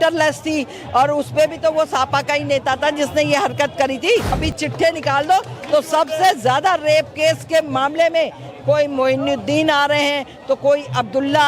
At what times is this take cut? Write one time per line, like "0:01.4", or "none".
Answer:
0:04.4

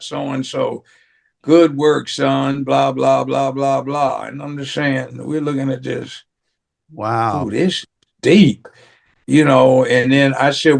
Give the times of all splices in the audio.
none

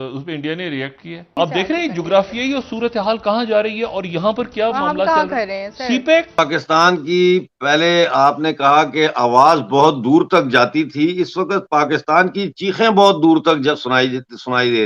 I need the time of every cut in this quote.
0:01.3
0:06.4

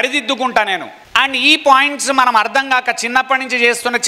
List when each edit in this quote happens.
0:01.0

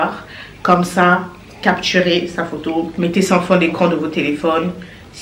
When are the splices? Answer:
0:02.9

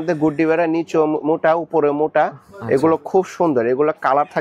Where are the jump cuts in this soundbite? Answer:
none

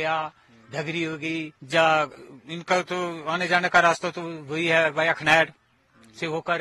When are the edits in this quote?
0:01.6

